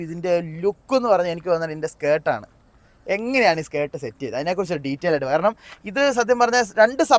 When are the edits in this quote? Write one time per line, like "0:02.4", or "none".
none